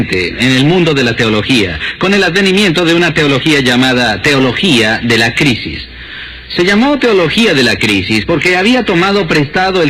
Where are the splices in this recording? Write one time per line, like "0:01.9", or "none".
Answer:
0:04.1